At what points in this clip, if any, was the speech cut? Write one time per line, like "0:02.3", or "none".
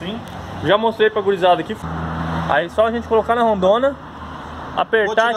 0:01.7